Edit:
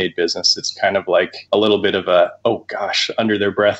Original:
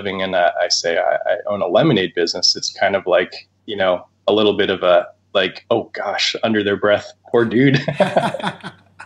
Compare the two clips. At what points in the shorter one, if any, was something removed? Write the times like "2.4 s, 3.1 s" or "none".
1.4 s, 2.3 s